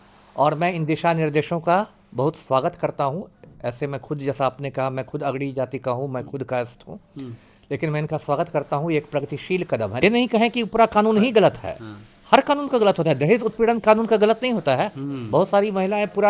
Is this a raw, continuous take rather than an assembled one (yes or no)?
no